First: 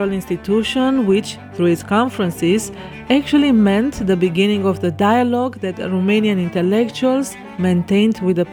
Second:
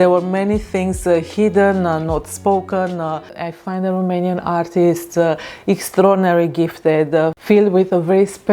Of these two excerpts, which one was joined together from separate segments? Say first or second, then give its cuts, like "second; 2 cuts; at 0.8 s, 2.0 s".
second; 1 cut; at 3.4 s